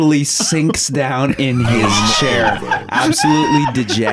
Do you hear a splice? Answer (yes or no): no